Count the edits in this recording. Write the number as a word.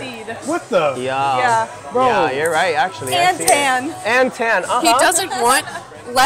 zero